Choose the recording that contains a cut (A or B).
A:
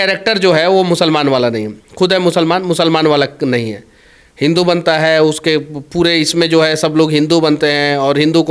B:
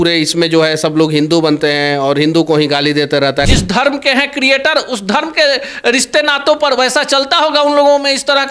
B